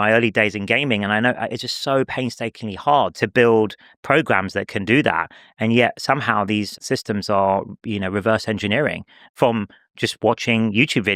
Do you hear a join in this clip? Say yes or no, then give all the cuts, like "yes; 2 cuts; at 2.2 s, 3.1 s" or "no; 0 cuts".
no; 0 cuts